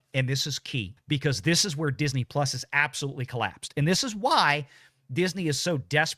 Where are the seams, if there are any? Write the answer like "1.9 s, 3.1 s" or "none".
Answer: 0.9 s